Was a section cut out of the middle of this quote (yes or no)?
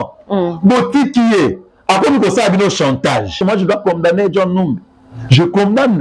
yes